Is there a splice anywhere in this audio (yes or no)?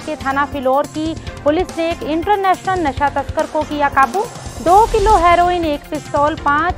no